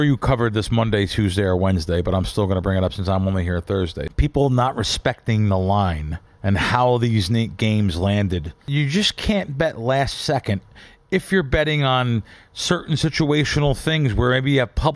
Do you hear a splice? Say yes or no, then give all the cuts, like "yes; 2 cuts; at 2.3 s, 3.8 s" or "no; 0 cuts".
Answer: yes; 2 cuts; at 4.1 s, 8.7 s